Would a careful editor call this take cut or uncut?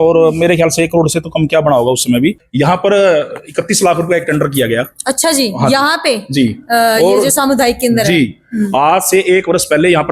cut